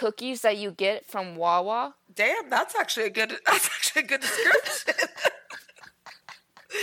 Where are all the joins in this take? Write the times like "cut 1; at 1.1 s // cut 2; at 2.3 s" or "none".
cut 1; at 2.0 s

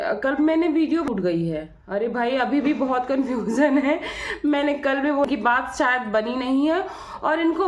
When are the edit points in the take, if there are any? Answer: cut 1; at 1.1 s // cut 2; at 5.3 s

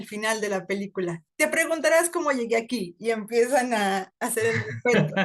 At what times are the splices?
cut 1; at 1.2 s

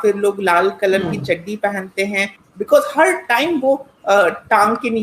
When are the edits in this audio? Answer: cut 1; at 2.4 s

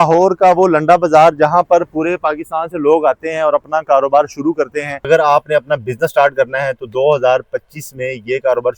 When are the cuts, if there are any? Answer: cut 1; at 5.0 s

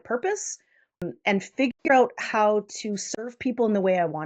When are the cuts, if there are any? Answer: cut 1; at 1.0 s

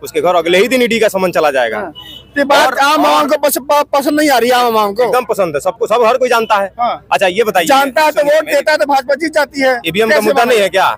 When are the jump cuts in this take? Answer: none

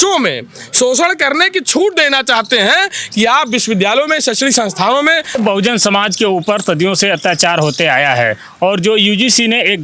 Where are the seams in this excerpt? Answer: cut 1; at 5.4 s

